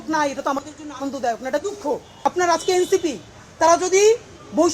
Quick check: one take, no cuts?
no; 1 cut; at 2.2 s

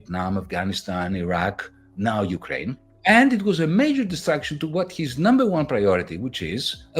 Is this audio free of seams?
no; 1 cut; at 2.8 s

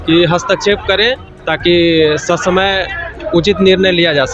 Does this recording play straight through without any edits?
no; 1 cut; at 1.3 s

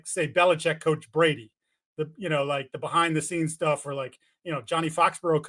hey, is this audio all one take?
yes; 0 cuts

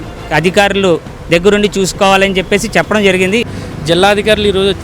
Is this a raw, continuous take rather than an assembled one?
no; 1 cut; at 3.6 s

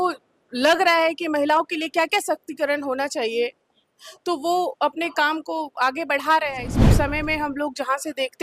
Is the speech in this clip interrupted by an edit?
yes; 1 cut; at 6.7 s

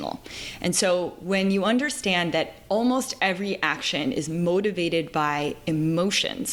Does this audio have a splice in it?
no; 0 cuts

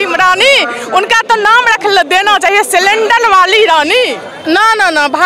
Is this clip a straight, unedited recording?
no; 1 cut; at 4.3 s

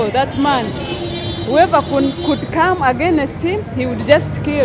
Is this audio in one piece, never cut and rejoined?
yes; 0 cuts

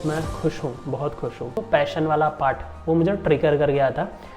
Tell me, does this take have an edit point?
yes; 1 cut; at 1.6 s

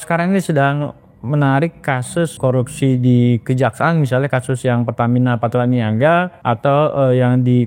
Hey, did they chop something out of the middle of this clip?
yes; 2 cuts; at 2.4 s, 6.3 s

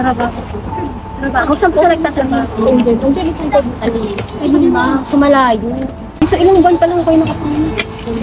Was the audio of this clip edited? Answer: yes; 1 cut; at 6.2 s

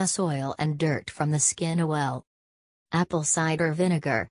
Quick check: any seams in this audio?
yes; 1 cut; at 1.7 s

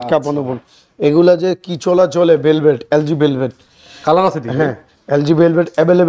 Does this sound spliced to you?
no; 0 cuts

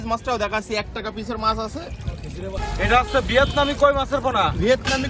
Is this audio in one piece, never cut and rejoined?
no; 1 cut; at 2.6 s

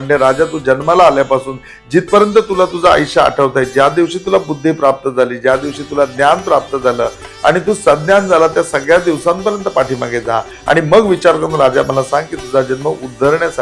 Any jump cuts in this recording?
no; 0 cuts

